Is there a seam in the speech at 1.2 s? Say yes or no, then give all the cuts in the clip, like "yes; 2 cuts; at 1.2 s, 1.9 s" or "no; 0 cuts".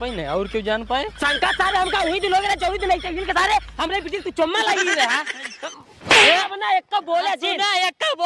yes; 1 cut; at 1.2 s